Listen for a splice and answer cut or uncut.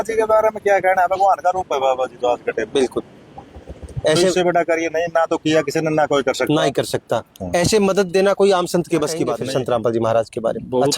cut